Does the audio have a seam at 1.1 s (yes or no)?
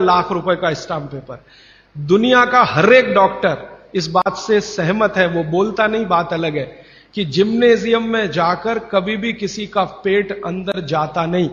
no